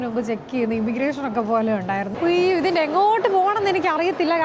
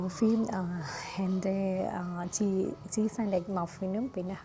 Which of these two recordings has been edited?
first; 1 cut; at 2.1 s

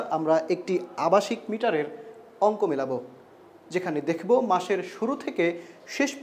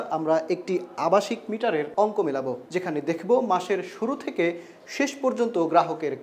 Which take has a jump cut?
second; 2 cuts; at 1.9 s, 2.6 s

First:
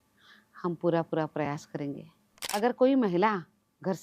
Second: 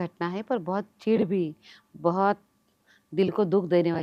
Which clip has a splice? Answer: first; 1 cut; at 2.4 s

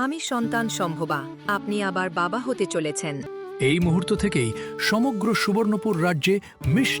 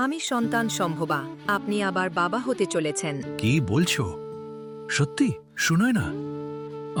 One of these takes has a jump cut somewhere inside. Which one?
first; 1 cut; at 3.3 s

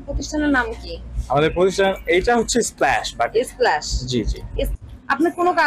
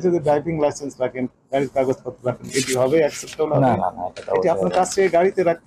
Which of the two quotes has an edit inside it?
first; 1 cut; at 4.7 s

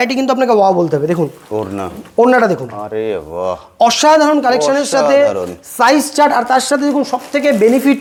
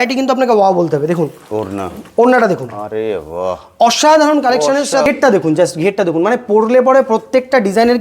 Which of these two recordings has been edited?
second; 1 cut; at 5.1 s

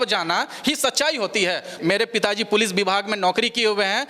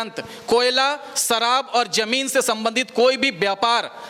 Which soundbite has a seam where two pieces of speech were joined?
first; 1 cut; at 1.7 s

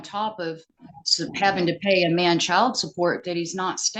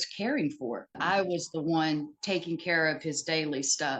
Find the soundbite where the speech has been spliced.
second; 1 cut; at 1.0 s

